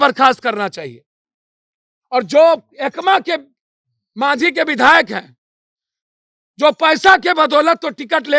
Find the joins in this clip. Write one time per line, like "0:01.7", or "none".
none